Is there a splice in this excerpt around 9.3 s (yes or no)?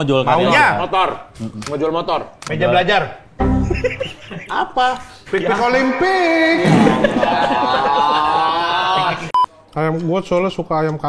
yes